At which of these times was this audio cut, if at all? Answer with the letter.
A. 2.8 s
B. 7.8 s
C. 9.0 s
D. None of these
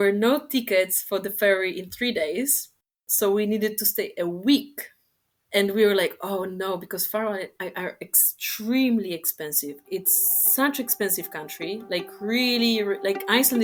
D